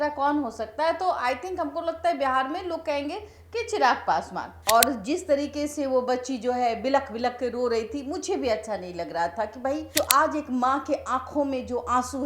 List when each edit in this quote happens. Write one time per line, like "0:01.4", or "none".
0:04.5
0:09.9